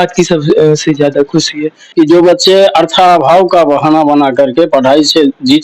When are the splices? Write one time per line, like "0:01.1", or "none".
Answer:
0:01.8